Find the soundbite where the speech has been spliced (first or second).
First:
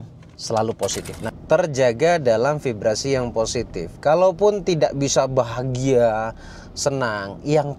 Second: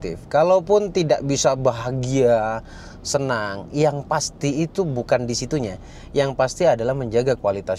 first